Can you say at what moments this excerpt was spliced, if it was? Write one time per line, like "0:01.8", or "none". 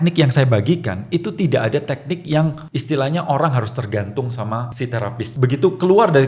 0:02.7
0:05.1